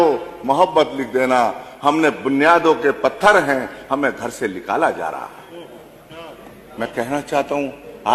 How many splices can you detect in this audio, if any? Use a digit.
0